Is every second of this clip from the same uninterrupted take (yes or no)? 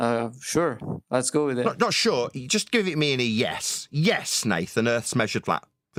yes